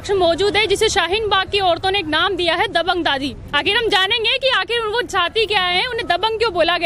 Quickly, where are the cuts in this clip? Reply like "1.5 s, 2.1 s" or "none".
none